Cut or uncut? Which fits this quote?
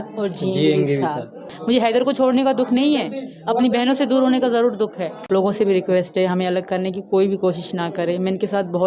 cut